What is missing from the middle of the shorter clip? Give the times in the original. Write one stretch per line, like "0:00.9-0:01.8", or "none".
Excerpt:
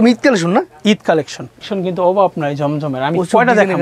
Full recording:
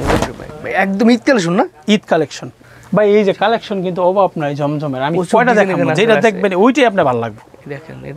0:02.7-0:03.7